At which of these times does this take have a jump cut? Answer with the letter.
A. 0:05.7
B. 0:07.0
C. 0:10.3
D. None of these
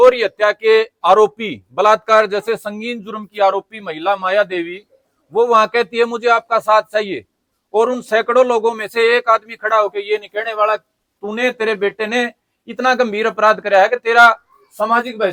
D